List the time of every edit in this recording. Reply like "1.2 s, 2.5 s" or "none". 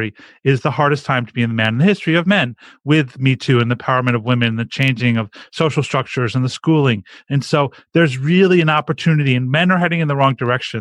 none